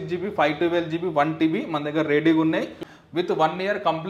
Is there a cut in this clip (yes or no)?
yes